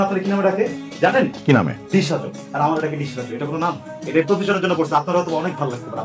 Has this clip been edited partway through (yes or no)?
no